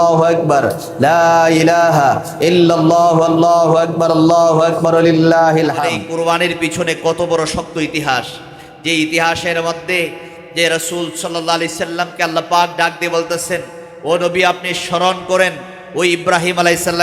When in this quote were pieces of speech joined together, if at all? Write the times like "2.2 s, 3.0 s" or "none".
6.0 s